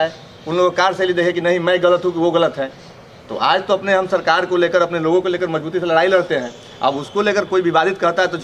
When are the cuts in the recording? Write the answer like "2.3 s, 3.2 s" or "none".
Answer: none